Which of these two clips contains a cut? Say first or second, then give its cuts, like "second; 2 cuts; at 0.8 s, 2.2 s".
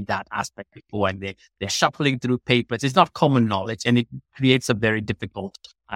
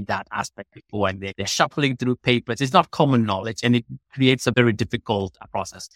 second; 2 cuts; at 1.3 s, 4.5 s